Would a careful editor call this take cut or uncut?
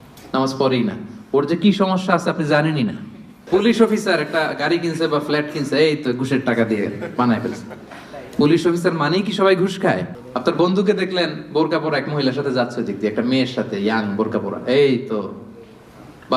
cut